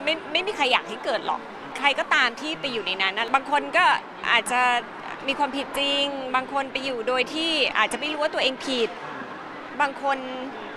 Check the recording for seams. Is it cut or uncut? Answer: cut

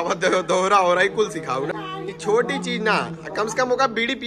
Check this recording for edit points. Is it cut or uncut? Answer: cut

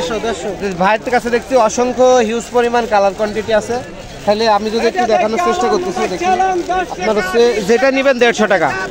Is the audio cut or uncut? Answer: uncut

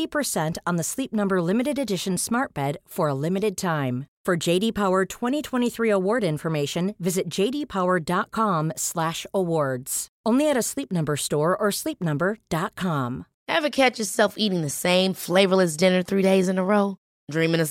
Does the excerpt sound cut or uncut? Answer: cut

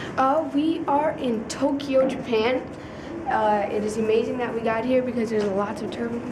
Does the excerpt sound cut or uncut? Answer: uncut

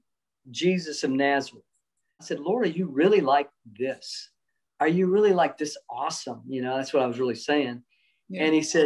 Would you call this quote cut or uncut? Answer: cut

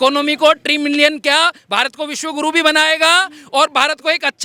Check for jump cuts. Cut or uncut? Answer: uncut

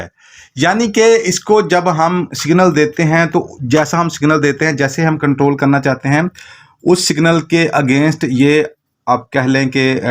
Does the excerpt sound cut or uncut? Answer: uncut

